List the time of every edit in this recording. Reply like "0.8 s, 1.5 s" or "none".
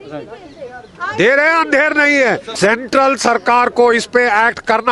2.5 s